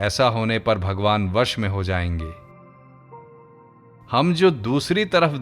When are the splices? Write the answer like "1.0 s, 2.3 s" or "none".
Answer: 2.3 s, 3.8 s